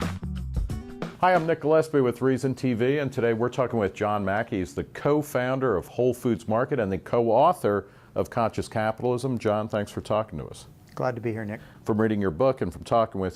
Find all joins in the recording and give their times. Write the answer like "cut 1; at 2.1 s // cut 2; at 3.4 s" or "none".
cut 1; at 9.4 s